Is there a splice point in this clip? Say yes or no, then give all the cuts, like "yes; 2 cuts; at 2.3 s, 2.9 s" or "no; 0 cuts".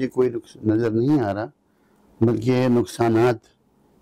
no; 0 cuts